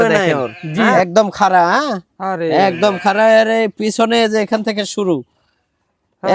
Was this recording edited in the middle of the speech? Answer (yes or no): yes